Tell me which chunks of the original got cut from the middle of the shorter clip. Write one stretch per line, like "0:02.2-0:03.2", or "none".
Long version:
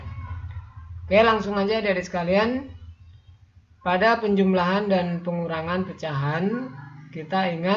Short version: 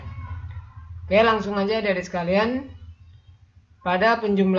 none